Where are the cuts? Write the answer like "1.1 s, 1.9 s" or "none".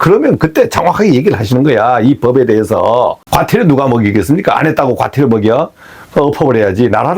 3.2 s